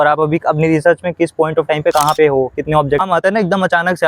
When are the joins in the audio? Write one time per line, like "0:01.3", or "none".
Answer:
0:03.0